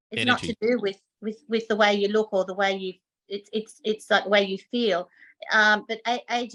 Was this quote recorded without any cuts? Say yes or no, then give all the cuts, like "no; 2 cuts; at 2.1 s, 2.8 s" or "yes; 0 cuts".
yes; 0 cuts